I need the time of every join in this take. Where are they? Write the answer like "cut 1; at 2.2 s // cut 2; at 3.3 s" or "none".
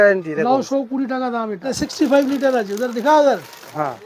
cut 1; at 1.8 s